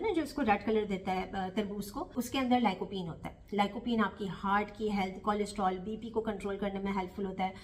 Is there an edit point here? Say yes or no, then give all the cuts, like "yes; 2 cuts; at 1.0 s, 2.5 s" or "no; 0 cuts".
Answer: no; 0 cuts